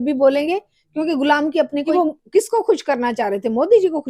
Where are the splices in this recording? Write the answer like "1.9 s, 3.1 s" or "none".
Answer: 1.9 s